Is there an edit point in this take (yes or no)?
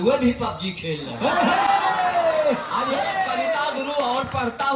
no